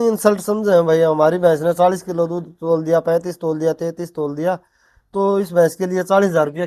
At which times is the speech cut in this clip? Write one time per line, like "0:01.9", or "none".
none